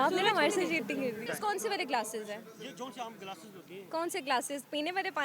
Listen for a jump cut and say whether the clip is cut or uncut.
cut